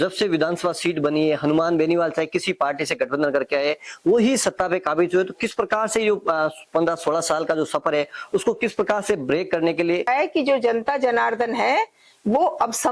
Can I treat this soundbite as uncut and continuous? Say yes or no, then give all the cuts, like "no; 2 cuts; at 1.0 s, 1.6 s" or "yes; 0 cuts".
no; 1 cut; at 10.1 s